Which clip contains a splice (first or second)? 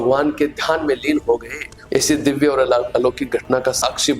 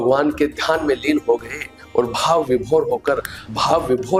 first